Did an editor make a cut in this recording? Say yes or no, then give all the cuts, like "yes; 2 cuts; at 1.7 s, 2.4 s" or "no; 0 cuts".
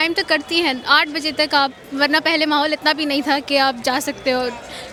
no; 0 cuts